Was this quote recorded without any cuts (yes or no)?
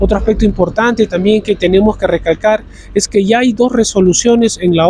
yes